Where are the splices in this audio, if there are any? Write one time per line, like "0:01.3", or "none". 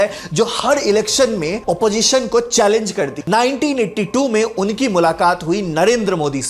0:03.2